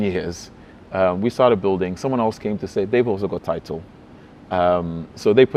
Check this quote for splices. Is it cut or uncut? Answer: uncut